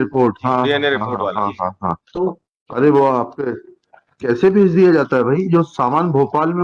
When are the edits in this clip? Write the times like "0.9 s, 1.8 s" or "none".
none